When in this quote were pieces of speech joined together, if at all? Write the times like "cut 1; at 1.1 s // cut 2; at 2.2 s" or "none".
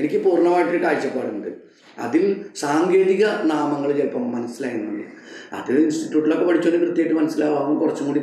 none

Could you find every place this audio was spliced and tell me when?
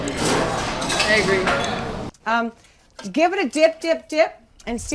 cut 1; at 2.0 s

